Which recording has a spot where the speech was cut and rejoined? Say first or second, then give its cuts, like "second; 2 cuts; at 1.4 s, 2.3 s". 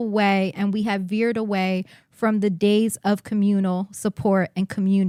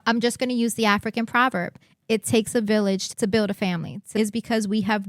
second; 2 cuts; at 3.0 s, 4.0 s